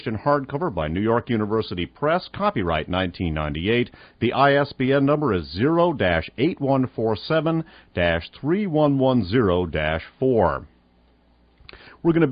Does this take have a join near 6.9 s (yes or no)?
yes